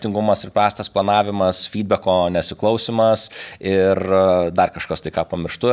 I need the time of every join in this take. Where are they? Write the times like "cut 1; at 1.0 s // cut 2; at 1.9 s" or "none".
none